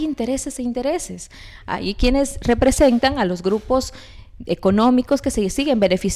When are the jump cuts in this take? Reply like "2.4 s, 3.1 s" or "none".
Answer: none